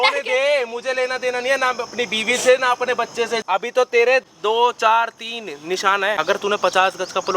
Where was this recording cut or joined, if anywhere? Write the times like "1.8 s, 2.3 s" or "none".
3.4 s, 6.2 s

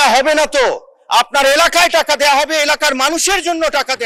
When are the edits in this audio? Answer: none

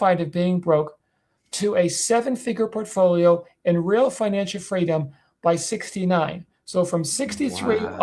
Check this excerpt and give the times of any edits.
none

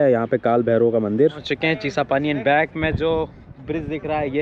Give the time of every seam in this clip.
1.5 s

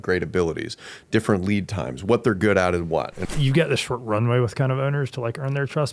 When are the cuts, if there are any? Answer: 3.2 s

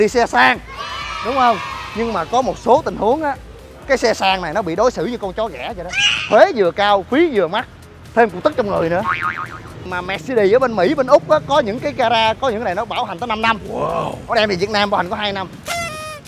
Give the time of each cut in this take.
6.2 s, 9.8 s

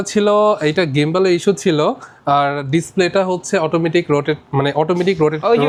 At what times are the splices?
none

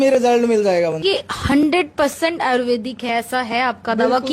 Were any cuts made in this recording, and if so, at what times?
1.0 s

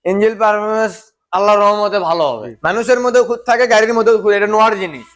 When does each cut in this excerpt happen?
2.5 s

